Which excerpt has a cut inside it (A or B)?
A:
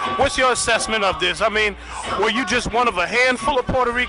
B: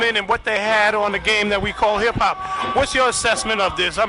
A